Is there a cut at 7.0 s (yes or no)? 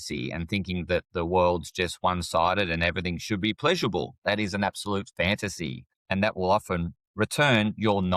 yes